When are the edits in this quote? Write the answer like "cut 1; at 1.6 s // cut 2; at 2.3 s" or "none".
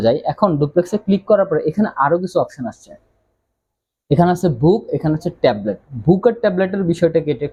none